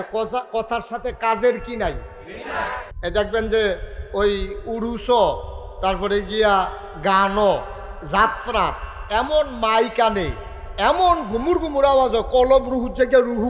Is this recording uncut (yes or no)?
no